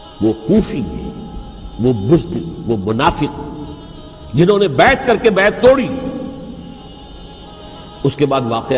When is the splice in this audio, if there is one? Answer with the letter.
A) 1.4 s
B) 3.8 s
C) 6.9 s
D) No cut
C